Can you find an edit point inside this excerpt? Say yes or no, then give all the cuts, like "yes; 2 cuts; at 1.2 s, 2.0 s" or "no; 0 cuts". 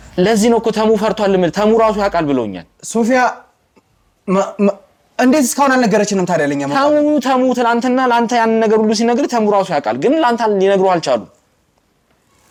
no; 0 cuts